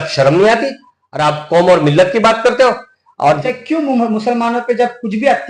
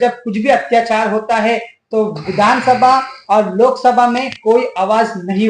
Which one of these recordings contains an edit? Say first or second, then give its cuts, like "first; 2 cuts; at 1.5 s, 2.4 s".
first; 1 cut; at 3.4 s